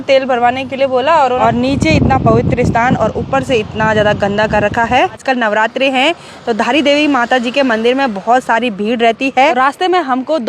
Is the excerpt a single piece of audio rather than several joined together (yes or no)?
no